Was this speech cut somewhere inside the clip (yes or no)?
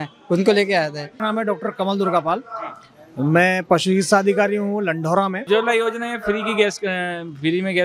yes